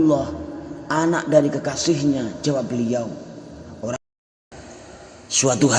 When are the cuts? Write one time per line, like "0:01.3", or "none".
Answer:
0:04.0